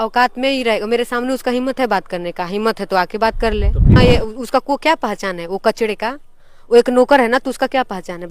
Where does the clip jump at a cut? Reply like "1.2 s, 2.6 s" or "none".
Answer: 3.9 s